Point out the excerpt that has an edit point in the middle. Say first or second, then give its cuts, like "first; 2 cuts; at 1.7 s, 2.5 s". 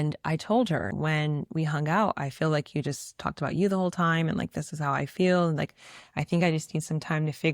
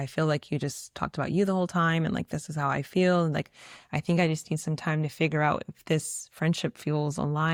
first; 1 cut; at 0.9 s